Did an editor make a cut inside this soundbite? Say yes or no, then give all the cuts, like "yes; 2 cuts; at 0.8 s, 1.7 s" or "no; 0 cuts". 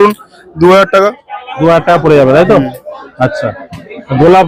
no; 0 cuts